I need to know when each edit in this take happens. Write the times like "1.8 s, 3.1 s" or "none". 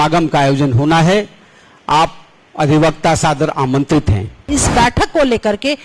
4.5 s

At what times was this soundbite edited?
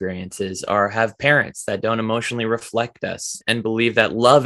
3.4 s

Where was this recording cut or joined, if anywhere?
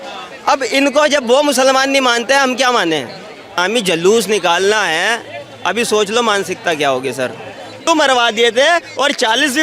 3.6 s, 7.9 s

